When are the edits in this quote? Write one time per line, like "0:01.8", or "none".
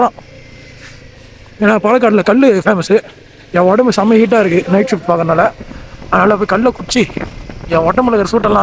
none